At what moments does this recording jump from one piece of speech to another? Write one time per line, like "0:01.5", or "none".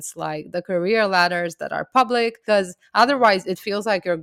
0:02.4

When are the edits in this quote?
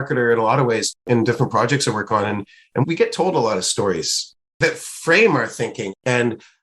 0:01.0
0:04.6

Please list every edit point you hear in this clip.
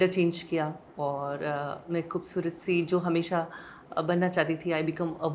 none

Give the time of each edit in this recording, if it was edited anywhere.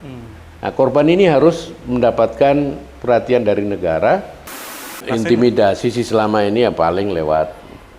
0:04.9

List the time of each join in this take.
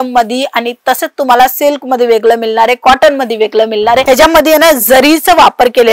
0:04.0

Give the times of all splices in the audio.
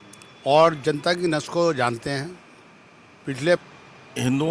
0:03.6

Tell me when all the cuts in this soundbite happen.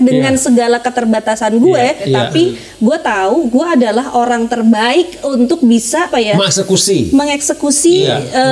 0:02.1
0:06.1

